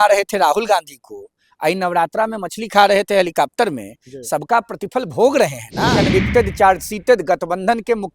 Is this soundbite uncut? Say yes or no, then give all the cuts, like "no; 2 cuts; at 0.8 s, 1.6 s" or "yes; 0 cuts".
no; 1 cut; at 6.0 s